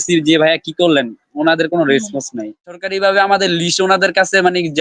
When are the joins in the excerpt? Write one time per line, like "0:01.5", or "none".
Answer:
0:02.7